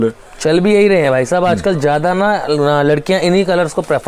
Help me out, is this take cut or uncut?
uncut